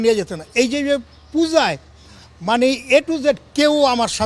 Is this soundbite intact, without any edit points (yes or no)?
yes